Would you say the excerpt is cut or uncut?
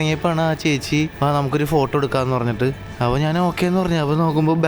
cut